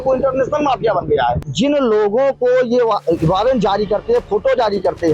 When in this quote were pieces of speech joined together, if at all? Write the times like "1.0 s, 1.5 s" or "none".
1.5 s